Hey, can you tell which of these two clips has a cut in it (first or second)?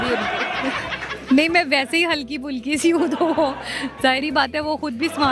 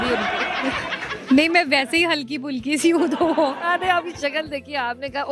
second